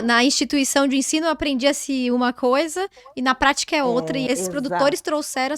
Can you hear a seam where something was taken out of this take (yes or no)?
yes